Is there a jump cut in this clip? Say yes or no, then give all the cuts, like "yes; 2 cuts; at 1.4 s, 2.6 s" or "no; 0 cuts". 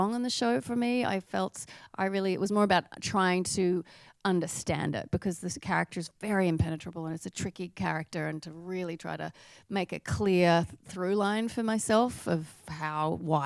no; 0 cuts